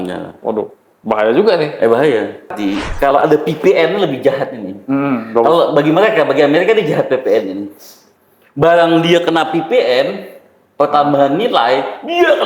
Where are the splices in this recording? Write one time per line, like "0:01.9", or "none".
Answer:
0:02.6